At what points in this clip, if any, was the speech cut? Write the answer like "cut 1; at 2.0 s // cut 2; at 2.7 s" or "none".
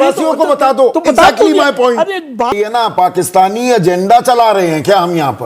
cut 1; at 2.5 s